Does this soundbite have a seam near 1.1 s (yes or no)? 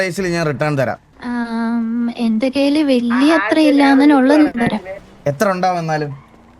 yes